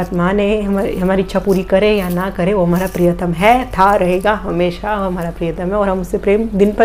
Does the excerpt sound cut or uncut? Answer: uncut